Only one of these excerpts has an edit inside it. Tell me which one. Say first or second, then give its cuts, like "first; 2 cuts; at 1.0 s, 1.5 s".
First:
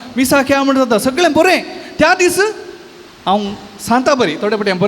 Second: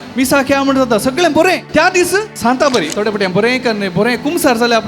second; 1 cut; at 2.0 s